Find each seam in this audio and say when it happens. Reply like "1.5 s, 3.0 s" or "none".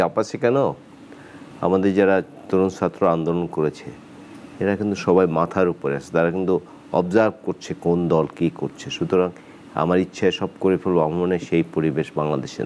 none